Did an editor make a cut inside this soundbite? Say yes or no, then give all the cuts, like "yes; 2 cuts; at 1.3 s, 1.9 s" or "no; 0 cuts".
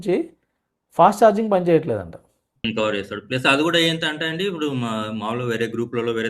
yes; 1 cut; at 2.6 s